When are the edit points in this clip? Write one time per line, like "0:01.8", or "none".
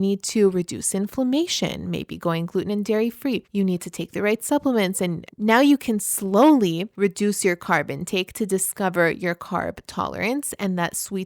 0:03.5
0:05.3
0:06.9

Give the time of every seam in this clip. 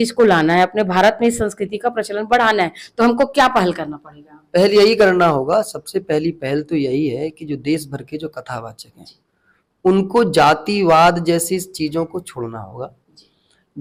none

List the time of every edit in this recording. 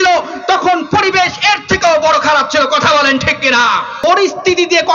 0:04.0

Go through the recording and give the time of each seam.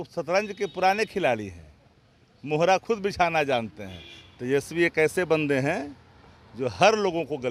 none

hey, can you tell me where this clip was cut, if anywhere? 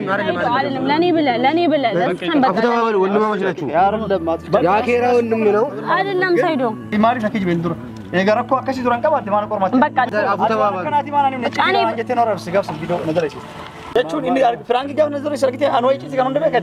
0:06.9
0:10.1
0:13.8

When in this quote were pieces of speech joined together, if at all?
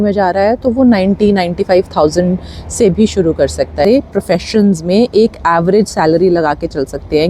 0:03.8

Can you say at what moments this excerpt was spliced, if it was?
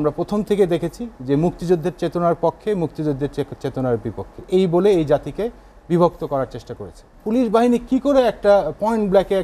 0:07.1

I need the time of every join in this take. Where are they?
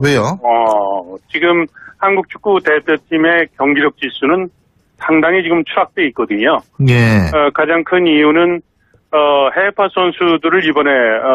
0:01.8

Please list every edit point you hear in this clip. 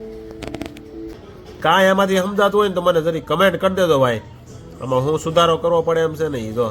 0:01.1

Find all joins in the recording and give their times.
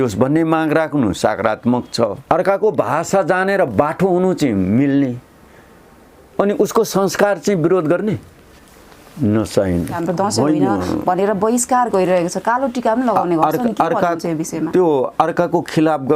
0:02.2
0:10.0

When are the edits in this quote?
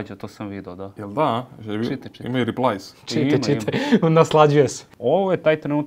0:04.8

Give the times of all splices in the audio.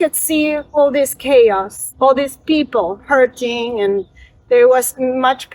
0:01.8

